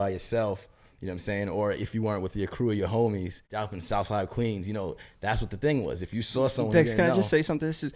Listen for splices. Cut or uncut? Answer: cut